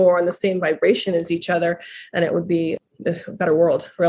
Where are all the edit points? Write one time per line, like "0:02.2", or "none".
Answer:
none